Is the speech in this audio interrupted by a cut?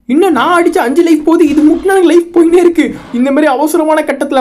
yes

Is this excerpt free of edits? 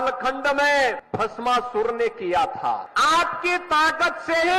no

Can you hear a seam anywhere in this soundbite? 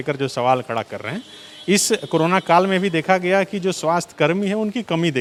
no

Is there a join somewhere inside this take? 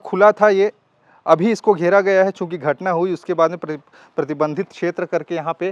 no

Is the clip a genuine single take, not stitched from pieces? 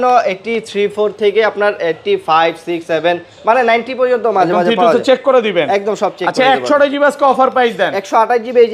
yes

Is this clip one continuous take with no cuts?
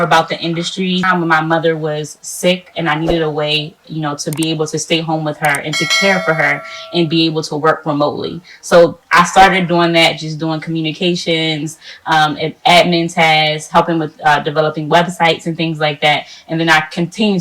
no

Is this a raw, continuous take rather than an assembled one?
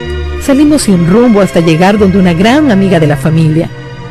yes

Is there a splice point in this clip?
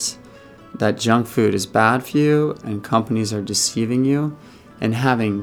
no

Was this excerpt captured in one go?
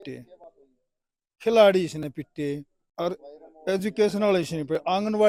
yes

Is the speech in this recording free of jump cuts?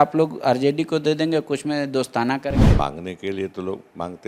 no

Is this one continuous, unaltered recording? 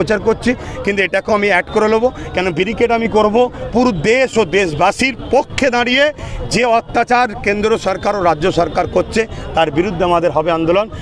yes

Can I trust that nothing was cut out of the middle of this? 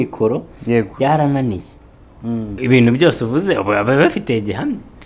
no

